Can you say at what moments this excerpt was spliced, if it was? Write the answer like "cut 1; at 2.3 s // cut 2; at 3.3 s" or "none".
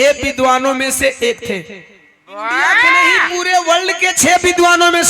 cut 1; at 3.2 s